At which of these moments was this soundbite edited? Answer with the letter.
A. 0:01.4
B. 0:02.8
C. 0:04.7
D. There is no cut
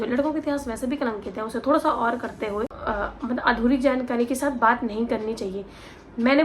B